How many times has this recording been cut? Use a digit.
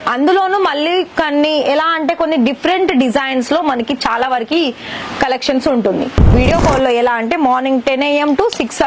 1